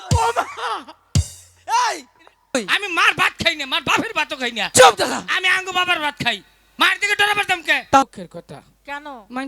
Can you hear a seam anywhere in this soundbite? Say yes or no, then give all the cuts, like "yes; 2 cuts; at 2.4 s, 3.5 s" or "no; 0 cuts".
yes; 2 cuts; at 2.5 s, 8.0 s